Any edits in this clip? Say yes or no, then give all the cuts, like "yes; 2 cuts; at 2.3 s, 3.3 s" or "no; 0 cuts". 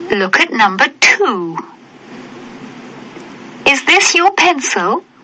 no; 0 cuts